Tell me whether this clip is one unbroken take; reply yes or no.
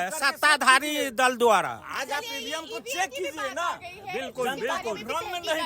yes